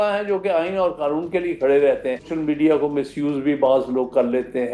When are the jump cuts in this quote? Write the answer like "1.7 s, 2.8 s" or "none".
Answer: 2.3 s